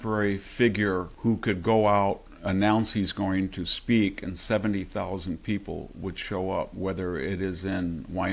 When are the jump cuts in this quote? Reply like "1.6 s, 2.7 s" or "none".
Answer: 1.1 s